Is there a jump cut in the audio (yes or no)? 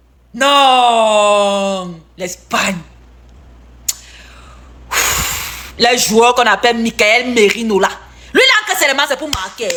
no